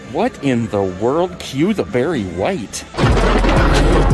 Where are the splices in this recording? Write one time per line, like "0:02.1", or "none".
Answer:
0:02.8